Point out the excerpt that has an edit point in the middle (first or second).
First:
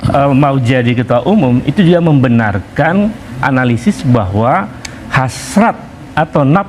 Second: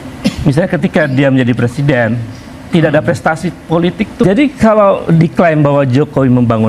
second